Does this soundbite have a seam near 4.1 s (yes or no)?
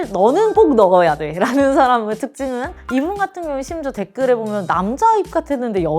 no